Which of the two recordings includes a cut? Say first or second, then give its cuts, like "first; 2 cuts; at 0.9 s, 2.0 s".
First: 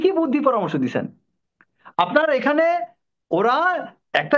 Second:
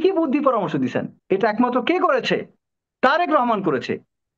second; 1 cut; at 1.1 s